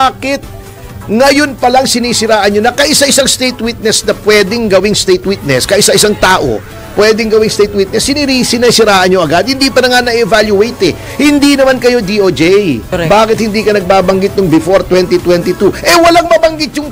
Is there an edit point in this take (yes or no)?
yes